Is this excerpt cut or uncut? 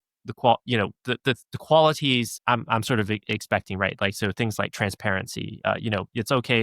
cut